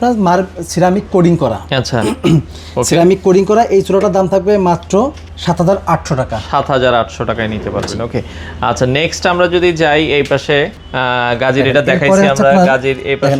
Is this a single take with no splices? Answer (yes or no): yes